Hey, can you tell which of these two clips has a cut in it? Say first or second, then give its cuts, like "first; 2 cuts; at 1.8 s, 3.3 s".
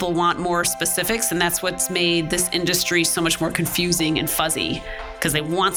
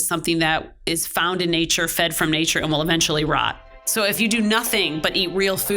second; 1 cut; at 4.2 s